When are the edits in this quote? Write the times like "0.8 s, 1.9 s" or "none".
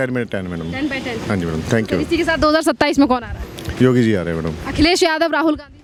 none